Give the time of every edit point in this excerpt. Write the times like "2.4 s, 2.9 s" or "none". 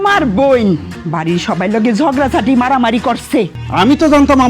1.0 s, 3.6 s